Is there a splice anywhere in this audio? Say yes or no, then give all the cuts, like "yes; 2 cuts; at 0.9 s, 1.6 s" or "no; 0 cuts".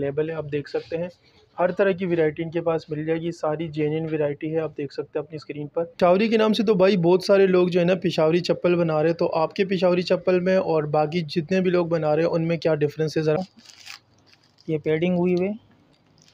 yes; 2 cuts; at 5.9 s, 13.4 s